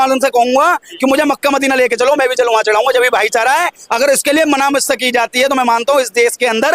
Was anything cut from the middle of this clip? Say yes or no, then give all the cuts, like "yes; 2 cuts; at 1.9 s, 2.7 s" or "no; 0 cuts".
no; 0 cuts